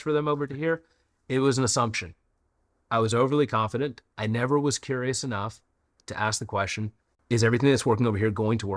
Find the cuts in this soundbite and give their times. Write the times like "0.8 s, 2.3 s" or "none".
7.1 s